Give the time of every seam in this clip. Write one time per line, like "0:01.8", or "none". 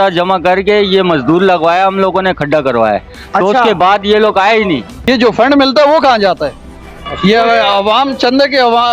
0:04.9